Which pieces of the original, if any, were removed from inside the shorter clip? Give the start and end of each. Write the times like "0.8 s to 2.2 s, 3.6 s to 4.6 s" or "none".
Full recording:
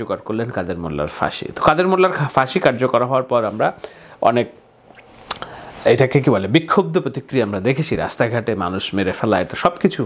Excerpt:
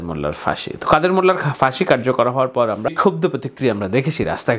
3.6 s to 6.6 s